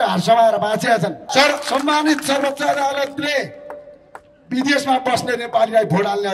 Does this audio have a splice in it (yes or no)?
yes